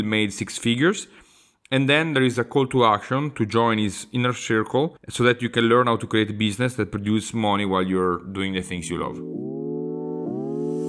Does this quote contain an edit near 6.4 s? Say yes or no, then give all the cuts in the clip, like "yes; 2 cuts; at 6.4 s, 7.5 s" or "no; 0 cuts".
no; 1 cut; at 9.7 s